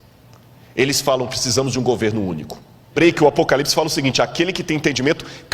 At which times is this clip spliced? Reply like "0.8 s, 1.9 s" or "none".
2.9 s